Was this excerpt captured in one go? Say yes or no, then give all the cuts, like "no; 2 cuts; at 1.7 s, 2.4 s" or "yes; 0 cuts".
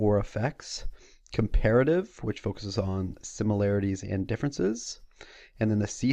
yes; 0 cuts